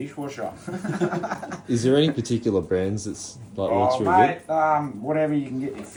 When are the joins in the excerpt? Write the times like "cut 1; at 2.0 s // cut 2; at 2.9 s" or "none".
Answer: none